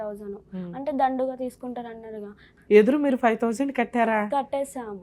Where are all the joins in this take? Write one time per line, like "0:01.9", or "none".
0:02.5